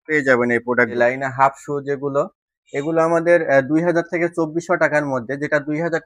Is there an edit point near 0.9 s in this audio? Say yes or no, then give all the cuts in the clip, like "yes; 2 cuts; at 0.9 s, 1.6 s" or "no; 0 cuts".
yes; 1 cut; at 0.9 s